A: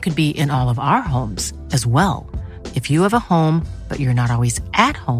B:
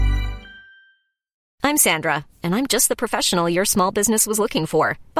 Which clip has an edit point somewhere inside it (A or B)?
B